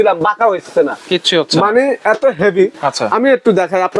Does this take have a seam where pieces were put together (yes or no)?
no